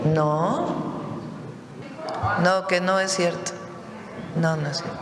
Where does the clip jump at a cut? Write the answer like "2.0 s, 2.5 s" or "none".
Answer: 1.8 s